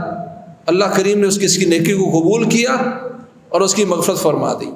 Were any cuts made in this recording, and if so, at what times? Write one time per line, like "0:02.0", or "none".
none